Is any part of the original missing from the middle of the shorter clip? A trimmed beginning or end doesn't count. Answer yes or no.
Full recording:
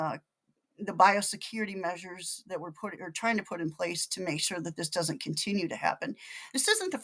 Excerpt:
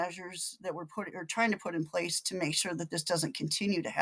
no